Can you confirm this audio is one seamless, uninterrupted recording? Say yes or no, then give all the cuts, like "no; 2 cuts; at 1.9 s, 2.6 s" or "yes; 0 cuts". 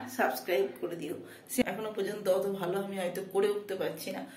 no; 1 cut; at 1.4 s